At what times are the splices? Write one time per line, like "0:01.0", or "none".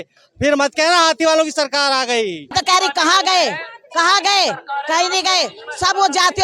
0:02.5